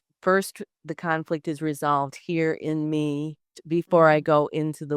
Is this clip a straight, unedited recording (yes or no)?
no